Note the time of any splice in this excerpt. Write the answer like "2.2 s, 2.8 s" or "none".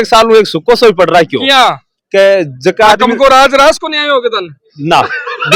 none